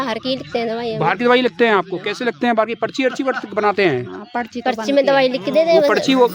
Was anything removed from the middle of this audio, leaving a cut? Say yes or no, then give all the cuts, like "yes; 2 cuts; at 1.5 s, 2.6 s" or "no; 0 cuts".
no; 0 cuts